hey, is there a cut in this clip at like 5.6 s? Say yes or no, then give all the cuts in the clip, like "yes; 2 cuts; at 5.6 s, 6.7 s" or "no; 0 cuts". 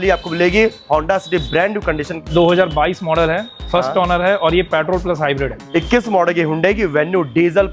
yes; 2 cuts; at 2.3 s, 5.6 s